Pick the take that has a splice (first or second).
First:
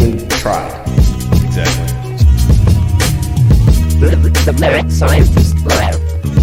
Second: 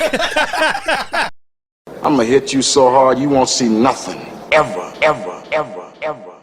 second